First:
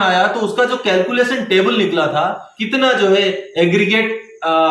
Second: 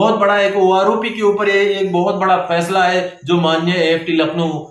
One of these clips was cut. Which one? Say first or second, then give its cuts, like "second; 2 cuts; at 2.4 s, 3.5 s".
first; 1 cut; at 2.5 s